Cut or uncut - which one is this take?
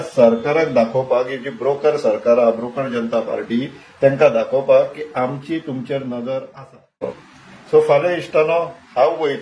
cut